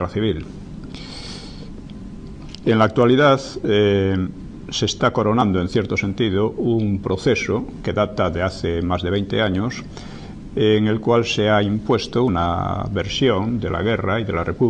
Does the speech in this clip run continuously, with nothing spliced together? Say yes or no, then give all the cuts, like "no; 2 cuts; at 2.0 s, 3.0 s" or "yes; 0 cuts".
no; 1 cut; at 5.7 s